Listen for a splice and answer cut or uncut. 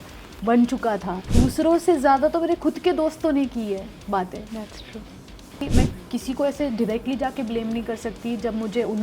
cut